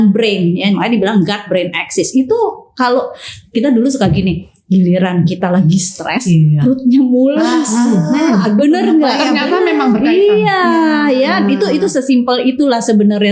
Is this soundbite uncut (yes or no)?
yes